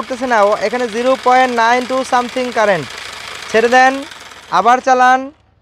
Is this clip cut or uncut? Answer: uncut